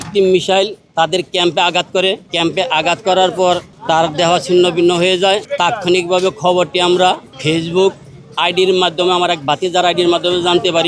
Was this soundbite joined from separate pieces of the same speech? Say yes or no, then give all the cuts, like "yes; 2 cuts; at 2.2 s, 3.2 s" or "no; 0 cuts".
yes; 4 cuts; at 2.3 s, 3.7 s, 5.5 s, 7.3 s